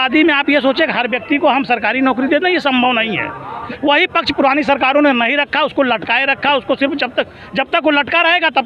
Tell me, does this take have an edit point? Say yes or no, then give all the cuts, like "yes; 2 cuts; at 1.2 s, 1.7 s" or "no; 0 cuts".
yes; 1 cut; at 3.6 s